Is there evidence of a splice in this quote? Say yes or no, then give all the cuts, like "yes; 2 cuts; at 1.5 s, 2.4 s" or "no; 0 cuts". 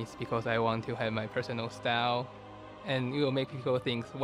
yes; 1 cut; at 2.4 s